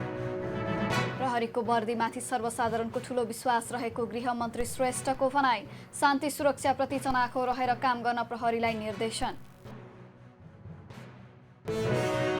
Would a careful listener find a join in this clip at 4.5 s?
no; 1 cut; at 1.1 s

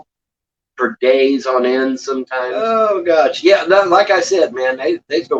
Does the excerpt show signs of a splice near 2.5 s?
yes; 1 cut; at 2.5 s

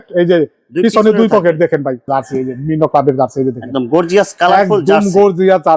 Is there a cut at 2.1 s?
yes; 1 cut; at 2.1 s

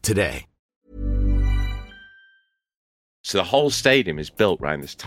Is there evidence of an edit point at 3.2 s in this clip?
yes; 1 cut; at 3.2 s

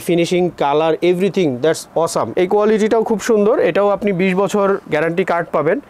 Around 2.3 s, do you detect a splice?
yes; 1 cut; at 2.3 s

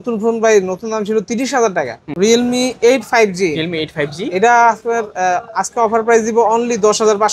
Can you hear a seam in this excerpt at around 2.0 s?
yes; 1 cut; at 2.0 s

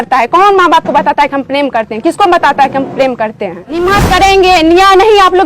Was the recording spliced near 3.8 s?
yes; 1 cut; at 3.8 s

